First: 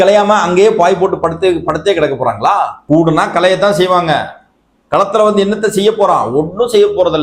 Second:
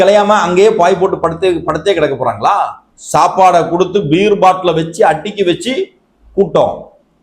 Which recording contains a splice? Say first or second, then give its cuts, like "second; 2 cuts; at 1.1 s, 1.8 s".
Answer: second; 1 cut; at 2.8 s